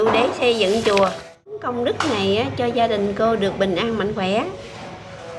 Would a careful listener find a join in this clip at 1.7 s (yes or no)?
yes